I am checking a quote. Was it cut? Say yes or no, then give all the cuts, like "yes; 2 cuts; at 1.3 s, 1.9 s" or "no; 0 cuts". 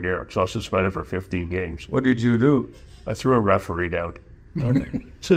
no; 0 cuts